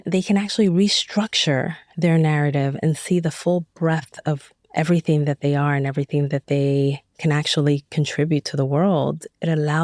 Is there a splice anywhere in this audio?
no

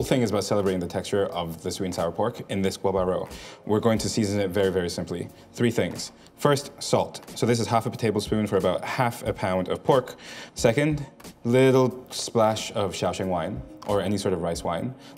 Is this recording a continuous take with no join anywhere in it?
yes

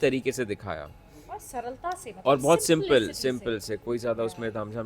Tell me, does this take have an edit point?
no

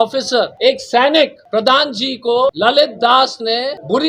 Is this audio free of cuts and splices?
yes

